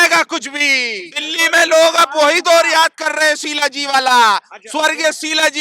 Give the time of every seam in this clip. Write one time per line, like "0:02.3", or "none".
0:01.2